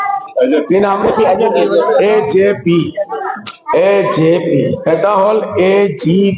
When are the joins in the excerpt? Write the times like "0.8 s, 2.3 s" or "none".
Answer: 3.2 s, 4.8 s

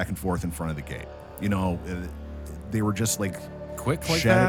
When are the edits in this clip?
none

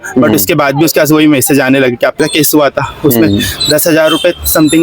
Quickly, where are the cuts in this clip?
2.2 s

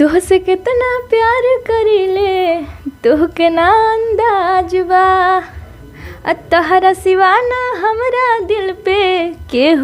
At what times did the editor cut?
none

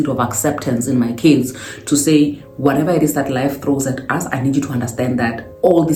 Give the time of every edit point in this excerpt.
none

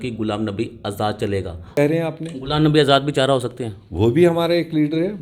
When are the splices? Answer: 1.8 s

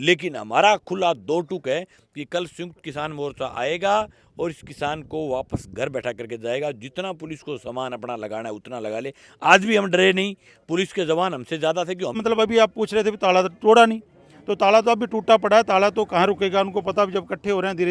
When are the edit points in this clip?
12.2 s

